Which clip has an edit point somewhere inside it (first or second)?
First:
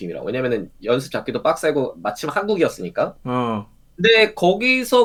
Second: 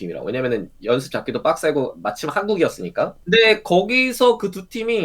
second